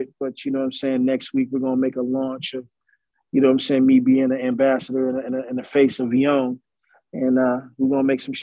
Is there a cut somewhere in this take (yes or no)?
no